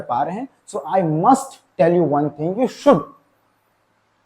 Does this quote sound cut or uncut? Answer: cut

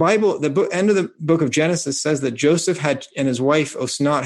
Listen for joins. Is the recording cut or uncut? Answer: cut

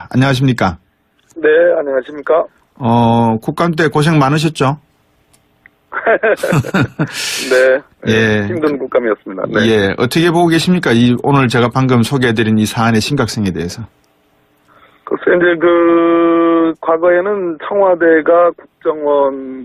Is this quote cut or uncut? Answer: uncut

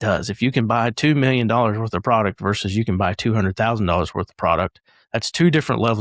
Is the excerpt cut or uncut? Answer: uncut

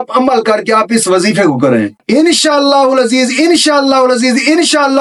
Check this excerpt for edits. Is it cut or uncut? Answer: uncut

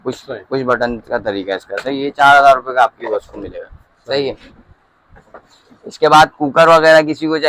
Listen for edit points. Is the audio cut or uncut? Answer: uncut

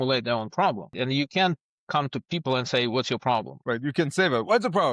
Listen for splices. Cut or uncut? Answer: cut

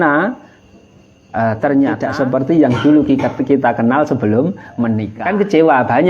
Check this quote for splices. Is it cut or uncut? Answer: cut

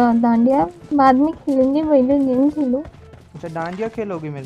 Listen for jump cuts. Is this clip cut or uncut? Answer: uncut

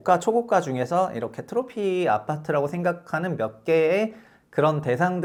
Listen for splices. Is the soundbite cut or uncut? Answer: uncut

